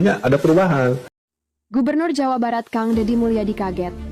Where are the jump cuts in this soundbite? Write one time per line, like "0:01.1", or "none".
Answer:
0:01.1